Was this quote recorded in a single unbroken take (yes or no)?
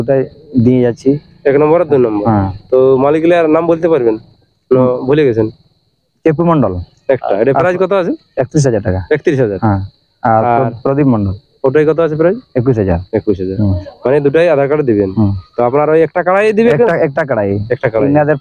yes